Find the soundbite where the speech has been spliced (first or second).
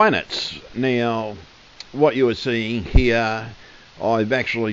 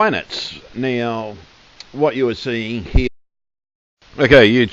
first